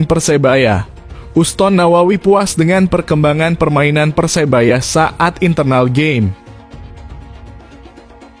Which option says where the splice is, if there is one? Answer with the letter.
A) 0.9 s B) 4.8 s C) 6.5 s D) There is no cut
C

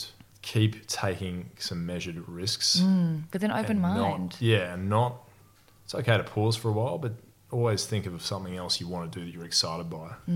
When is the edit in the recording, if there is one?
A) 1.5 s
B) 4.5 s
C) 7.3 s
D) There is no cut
D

